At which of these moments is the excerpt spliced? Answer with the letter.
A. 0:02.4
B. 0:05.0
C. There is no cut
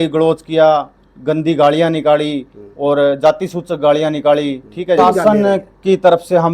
B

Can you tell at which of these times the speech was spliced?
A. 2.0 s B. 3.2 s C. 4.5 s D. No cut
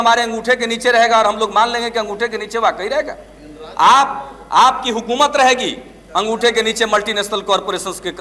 D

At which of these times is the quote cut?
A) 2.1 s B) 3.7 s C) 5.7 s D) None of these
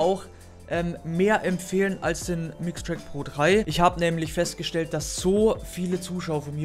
B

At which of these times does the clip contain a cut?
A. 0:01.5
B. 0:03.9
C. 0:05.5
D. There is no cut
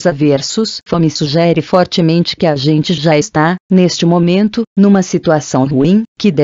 C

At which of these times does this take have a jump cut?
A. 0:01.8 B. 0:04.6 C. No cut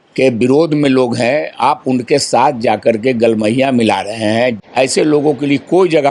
B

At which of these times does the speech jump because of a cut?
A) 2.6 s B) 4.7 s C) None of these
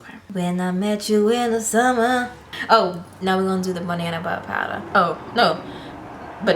A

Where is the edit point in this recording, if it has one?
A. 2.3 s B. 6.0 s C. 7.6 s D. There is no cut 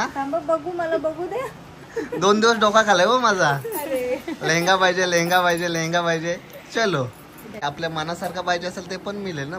C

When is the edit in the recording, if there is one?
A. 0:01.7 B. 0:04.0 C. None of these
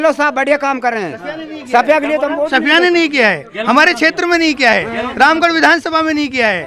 C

